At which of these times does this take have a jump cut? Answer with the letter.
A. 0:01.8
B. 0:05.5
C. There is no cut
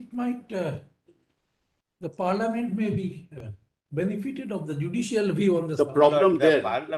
C